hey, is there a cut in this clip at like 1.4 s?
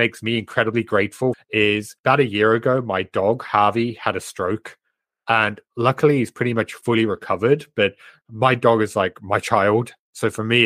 yes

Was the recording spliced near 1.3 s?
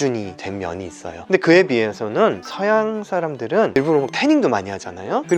yes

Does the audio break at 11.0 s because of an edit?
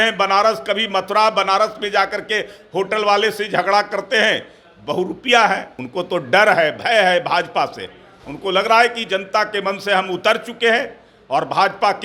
no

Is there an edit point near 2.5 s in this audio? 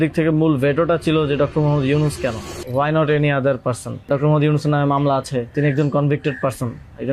yes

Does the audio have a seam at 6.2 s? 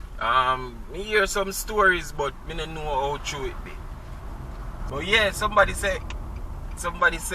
no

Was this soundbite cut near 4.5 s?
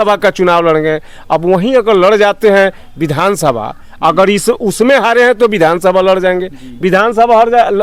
no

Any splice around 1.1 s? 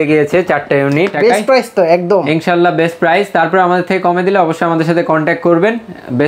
yes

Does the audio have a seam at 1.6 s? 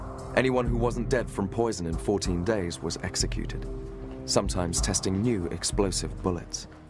no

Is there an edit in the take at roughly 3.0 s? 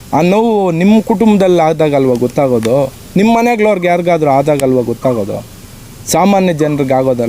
no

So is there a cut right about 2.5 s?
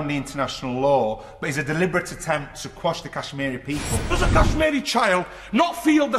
no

